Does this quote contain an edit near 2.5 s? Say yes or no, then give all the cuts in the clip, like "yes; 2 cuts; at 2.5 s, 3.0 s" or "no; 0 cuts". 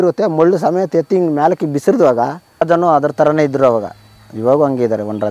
yes; 1 cut; at 2.5 s